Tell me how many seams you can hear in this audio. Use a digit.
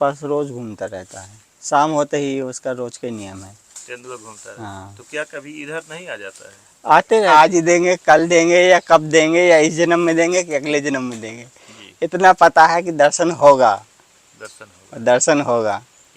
1